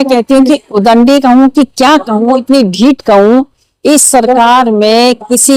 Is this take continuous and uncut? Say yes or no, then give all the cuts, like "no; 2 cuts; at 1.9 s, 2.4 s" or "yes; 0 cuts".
yes; 0 cuts